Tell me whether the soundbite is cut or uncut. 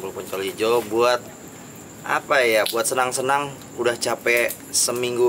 cut